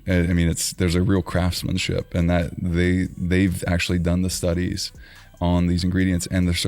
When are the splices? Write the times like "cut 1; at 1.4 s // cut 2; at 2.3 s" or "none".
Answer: none